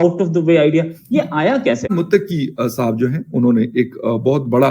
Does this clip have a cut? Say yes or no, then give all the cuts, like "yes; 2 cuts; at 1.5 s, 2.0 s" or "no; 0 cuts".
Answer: yes; 1 cut; at 1.9 s